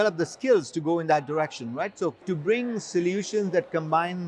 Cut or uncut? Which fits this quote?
cut